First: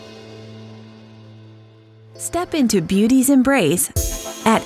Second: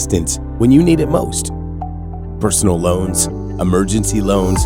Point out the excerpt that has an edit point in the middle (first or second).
first